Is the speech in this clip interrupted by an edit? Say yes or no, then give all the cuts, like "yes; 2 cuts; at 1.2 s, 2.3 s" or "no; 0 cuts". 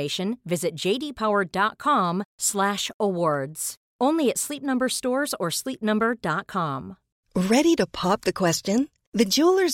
yes; 1 cut; at 7.2 s